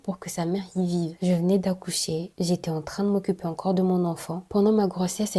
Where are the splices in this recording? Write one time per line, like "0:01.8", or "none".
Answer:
0:01.1
0:04.4